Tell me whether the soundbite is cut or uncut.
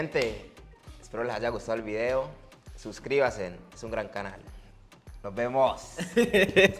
uncut